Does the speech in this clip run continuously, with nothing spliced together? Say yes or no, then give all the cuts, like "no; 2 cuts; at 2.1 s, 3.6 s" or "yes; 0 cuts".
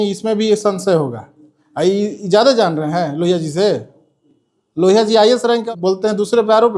no; 1 cut; at 5.6 s